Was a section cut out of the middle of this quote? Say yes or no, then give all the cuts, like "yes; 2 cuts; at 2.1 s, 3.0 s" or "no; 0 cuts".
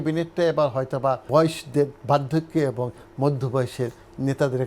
yes; 1 cut; at 1.2 s